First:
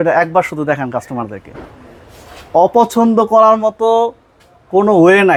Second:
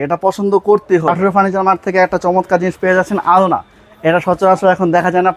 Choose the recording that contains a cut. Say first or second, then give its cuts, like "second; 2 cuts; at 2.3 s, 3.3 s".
second; 1 cut; at 1.1 s